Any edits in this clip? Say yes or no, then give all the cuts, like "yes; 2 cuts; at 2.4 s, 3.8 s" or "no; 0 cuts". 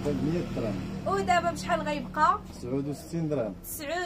no; 0 cuts